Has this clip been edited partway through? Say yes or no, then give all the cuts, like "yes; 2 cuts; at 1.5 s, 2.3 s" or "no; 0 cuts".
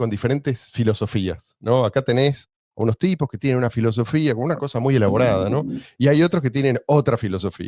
no; 0 cuts